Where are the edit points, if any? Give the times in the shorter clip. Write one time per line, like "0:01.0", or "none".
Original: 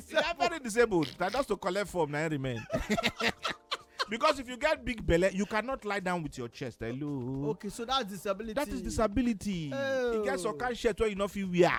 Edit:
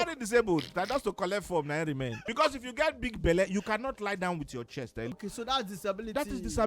0:02.2
0:05.2